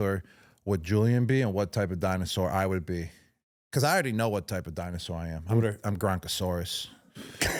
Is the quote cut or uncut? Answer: uncut